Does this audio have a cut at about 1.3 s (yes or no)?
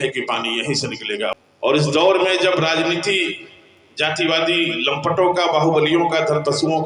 yes